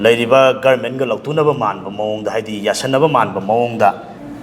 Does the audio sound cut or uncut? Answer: uncut